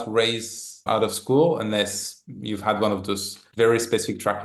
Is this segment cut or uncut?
uncut